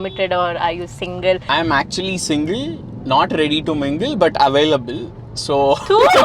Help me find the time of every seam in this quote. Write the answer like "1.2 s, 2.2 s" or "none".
1.5 s